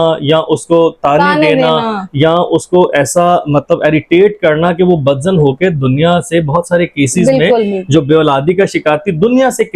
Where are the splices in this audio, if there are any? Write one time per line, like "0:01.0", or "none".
none